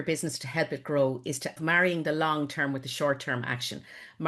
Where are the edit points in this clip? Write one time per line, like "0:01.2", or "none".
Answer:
0:01.6